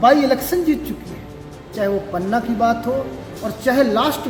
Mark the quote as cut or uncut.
uncut